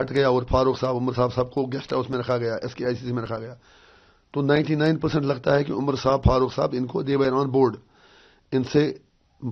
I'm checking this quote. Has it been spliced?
no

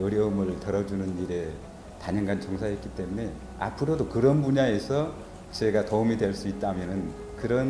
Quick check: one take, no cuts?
yes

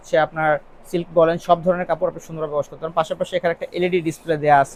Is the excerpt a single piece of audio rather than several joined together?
yes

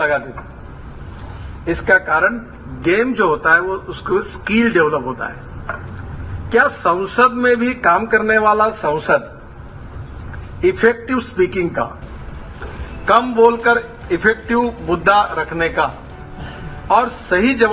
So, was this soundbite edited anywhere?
no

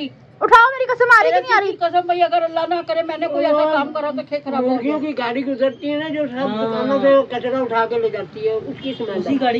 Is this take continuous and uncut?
yes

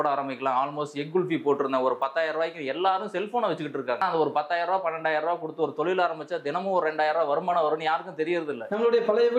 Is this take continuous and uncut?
no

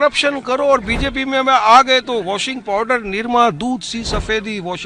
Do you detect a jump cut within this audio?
no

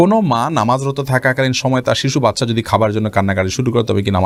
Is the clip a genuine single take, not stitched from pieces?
yes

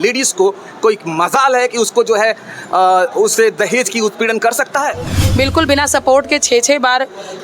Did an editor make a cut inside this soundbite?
yes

